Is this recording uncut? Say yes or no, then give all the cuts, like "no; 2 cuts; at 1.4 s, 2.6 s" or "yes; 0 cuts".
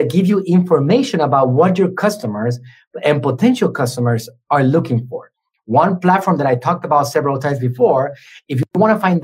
yes; 0 cuts